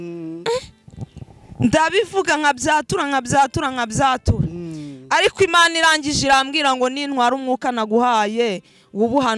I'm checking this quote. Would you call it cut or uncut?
uncut